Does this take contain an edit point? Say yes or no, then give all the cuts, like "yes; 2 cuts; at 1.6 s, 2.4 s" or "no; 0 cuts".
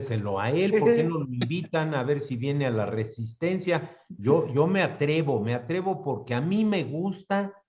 no; 0 cuts